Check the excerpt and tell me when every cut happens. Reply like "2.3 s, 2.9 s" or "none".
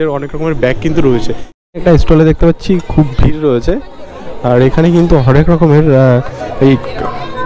1.7 s